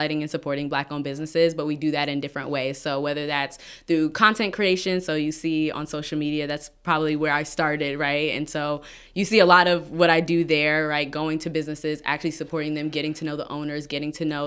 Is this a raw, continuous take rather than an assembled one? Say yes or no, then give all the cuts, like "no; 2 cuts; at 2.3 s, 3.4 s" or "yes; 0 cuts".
yes; 0 cuts